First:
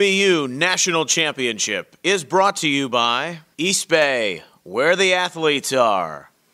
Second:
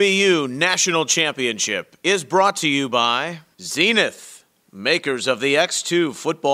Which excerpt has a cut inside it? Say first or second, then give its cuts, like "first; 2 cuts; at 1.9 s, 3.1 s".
second; 1 cut; at 3.4 s